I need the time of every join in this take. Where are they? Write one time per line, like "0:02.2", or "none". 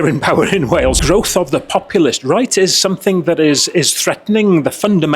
0:01.0